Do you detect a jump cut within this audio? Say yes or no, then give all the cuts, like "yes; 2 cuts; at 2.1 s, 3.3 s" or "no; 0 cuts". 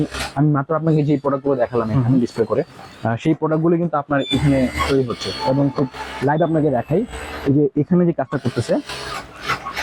no; 0 cuts